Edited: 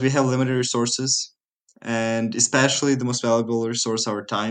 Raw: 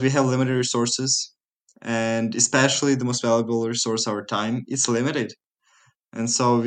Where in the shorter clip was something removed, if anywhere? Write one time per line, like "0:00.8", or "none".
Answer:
none